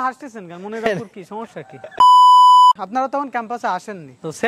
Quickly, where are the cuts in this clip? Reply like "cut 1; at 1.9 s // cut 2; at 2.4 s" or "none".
cut 1; at 2.0 s // cut 2; at 2.8 s